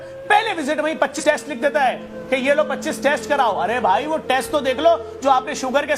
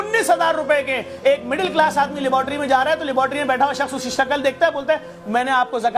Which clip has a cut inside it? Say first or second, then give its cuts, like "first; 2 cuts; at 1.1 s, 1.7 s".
first; 1 cut; at 1.2 s